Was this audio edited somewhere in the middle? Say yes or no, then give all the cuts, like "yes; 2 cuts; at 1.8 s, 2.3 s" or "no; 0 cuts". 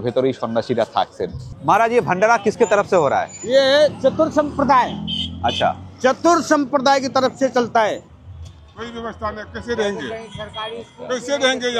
yes; 2 cuts; at 1.5 s, 8.1 s